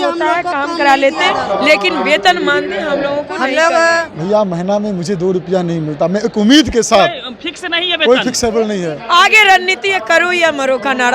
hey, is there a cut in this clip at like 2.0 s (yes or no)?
no